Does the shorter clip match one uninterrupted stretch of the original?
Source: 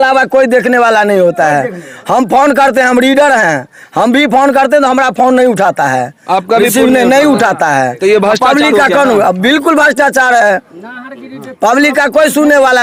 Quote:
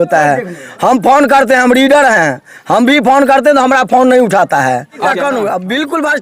no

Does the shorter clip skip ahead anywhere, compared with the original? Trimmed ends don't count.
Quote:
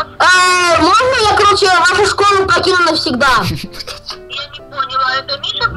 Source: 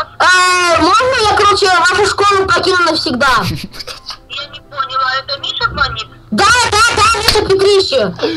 no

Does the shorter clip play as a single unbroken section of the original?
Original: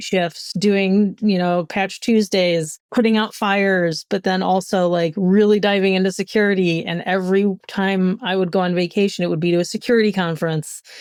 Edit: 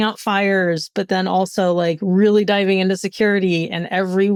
yes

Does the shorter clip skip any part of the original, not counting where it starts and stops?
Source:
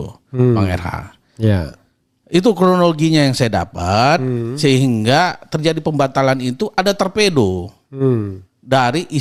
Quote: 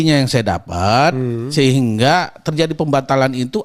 no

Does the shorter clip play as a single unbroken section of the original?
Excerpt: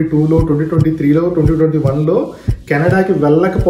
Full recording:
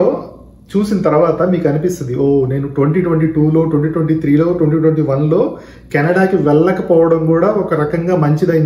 yes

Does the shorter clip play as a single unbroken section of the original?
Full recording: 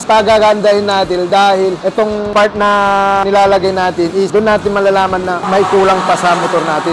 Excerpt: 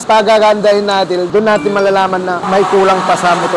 no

